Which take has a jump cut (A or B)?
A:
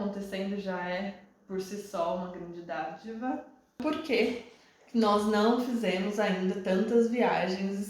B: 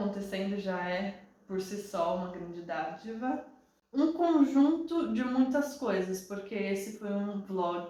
A